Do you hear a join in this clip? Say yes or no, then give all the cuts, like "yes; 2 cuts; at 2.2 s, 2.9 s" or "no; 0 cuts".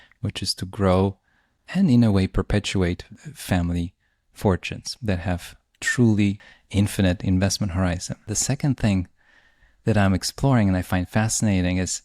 yes; 2 cuts; at 6.5 s, 8.3 s